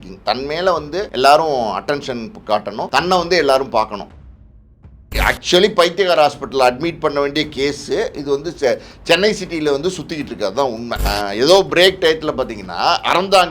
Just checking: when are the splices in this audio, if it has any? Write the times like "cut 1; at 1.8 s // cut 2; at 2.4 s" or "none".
cut 1; at 1.1 s // cut 2; at 2.9 s // cut 3; at 4.5 s // cut 4; at 11.0 s